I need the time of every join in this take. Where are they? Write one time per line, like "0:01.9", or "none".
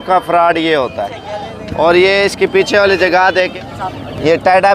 0:03.5